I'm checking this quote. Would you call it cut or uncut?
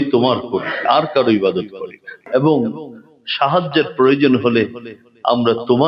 cut